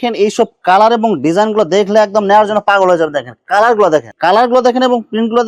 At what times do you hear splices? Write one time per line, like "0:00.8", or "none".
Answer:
0:04.1